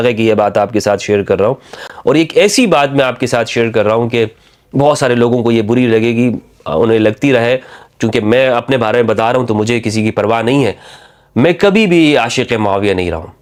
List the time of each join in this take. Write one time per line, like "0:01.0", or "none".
none